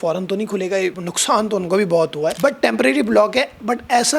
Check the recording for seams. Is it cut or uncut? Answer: cut